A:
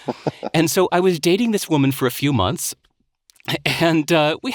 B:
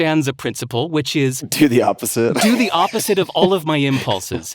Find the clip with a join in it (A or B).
B